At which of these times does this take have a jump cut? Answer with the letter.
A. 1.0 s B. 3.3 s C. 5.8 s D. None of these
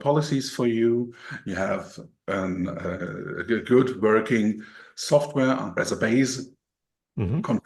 C